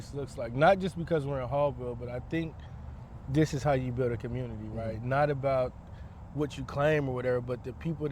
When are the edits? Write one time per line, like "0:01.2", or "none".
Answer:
none